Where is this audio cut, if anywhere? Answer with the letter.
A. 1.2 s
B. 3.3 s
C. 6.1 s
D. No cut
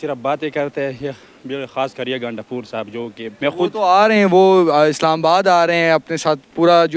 B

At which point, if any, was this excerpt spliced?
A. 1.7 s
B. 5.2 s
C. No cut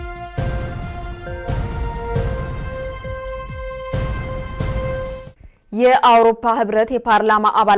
B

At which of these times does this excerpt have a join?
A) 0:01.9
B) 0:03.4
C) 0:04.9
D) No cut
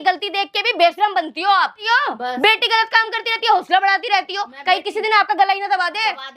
A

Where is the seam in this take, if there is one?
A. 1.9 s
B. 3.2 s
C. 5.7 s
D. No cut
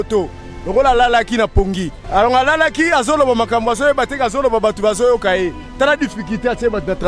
A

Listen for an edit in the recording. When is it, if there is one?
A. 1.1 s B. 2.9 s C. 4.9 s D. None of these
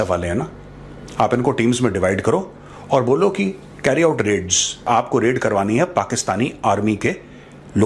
C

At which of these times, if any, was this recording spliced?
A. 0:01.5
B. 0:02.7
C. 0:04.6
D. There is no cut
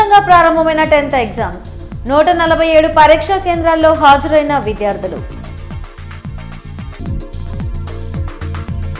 D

